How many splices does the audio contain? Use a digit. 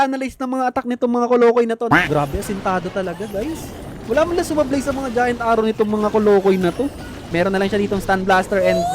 2